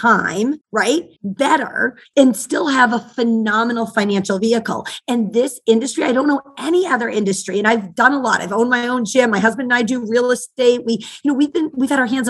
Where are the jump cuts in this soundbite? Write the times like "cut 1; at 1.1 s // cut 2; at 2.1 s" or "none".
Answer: cut 1; at 1.0 s // cut 2; at 2.0 s